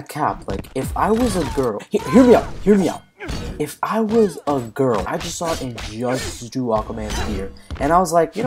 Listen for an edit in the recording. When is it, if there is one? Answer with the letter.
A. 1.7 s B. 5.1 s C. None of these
B